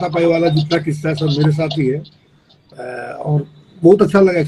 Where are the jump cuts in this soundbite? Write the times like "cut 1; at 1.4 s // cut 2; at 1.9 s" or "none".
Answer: none